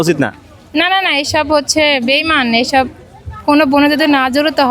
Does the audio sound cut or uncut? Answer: uncut